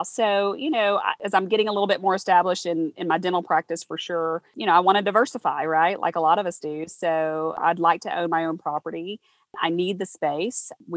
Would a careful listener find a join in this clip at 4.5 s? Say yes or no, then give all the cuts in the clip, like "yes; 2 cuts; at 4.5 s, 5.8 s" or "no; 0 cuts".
yes; 3 cuts; at 1.1 s, 4.5 s, 7.6 s